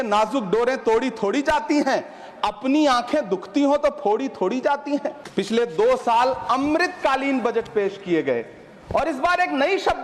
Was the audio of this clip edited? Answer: yes; 1 cut; at 5.2 s

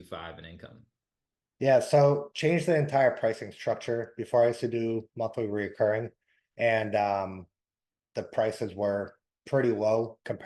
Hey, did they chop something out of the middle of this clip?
no; 0 cuts

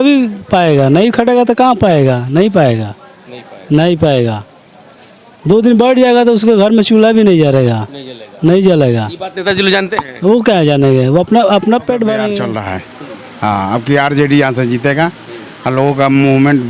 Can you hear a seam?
yes; 1 cut; at 12.4 s

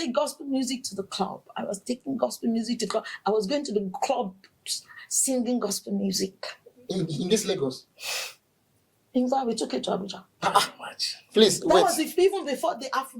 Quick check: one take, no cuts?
yes; 0 cuts

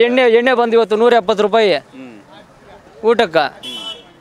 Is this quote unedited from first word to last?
yes; 0 cuts

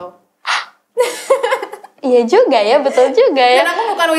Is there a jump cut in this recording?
no; 0 cuts

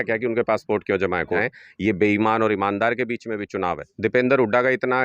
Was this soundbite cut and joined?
yes; 2 cuts; at 1.4 s, 3.9 s

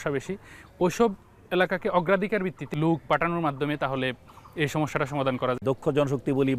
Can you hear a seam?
yes; 2 cuts; at 2.6 s, 5.6 s

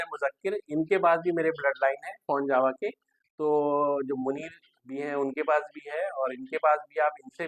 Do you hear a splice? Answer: no; 0 cuts

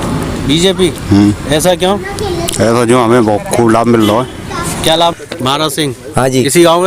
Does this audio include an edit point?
yes; 1 cut; at 5.1 s

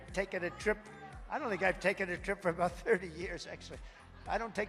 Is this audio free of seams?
yes; 0 cuts

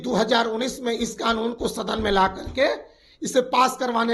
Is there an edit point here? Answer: no; 0 cuts

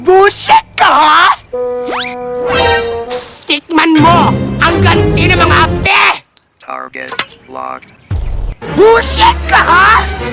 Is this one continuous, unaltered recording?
yes; 0 cuts

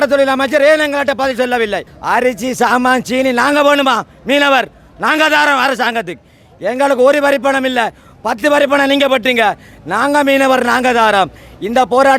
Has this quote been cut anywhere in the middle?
yes; 1 cut; at 1.9 s

